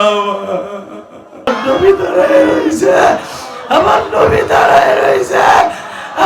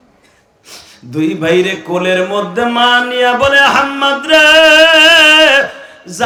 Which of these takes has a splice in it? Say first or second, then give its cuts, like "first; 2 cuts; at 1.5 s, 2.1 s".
first; 1 cut; at 1.5 s